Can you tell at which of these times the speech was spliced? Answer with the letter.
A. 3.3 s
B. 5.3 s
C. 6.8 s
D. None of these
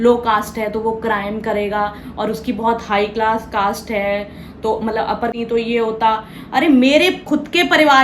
B